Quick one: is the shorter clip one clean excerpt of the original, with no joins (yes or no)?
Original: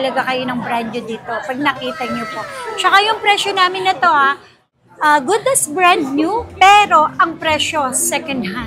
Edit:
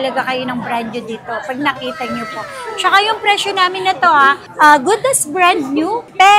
no